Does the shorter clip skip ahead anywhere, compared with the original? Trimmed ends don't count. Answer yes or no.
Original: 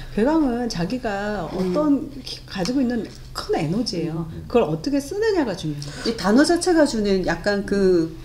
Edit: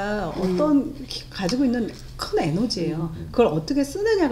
no